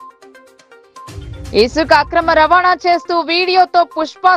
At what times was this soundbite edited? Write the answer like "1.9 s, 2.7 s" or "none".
1.1 s